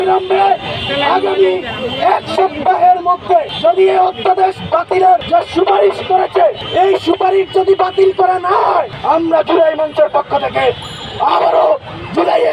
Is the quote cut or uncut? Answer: cut